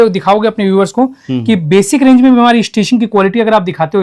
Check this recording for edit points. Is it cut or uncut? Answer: uncut